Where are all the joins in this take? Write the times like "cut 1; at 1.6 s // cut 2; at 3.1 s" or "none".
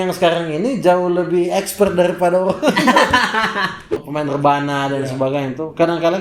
cut 1; at 4.0 s